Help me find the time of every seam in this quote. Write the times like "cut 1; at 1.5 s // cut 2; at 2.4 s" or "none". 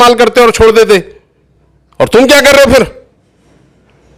none